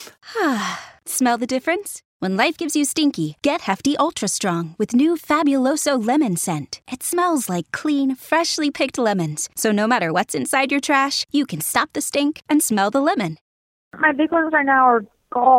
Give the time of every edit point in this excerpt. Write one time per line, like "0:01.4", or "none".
0:13.9